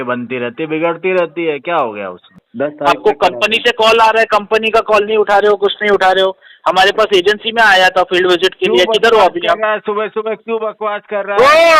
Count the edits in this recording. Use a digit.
1